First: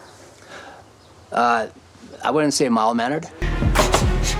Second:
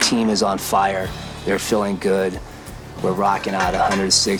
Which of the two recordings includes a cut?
first; 1 cut; at 3.4 s

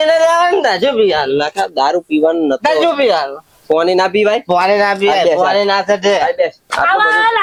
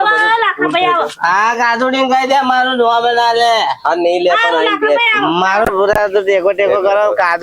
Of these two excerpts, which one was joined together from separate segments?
second; 1 cut; at 5.7 s

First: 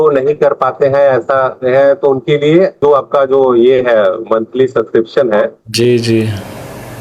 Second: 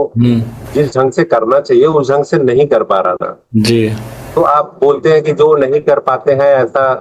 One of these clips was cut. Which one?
first; 1 cut; at 2.8 s

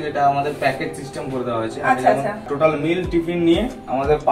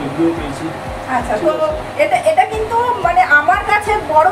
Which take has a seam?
first; 1 cut; at 2.5 s

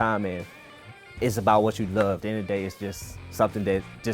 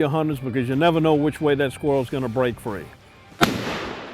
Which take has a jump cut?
first; 1 cut; at 2.2 s

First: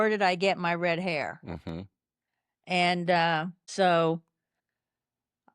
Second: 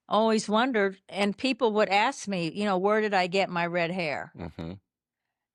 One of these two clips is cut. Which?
first; 1 cut; at 3.6 s

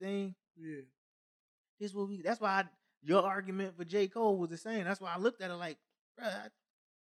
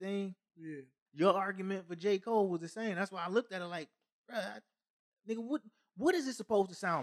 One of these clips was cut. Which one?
second; 1 cut; at 1.0 s

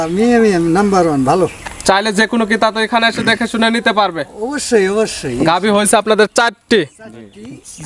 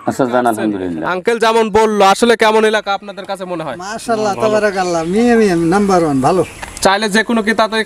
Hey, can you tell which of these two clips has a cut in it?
second; 1 cut; at 1.0 s

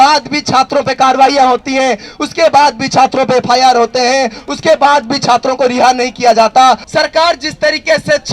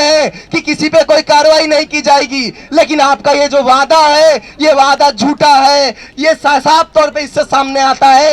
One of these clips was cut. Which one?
first; 1 cut; at 6.8 s

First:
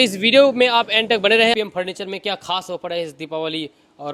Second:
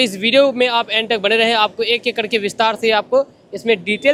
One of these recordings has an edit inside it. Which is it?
first; 1 cut; at 1.5 s

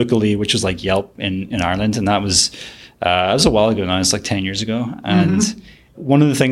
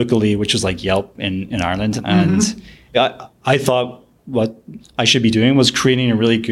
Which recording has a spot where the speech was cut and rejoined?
second; 2 cuts; at 2.0 s, 3.0 s

